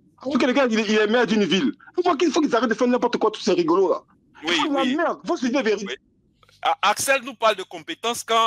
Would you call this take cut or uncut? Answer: uncut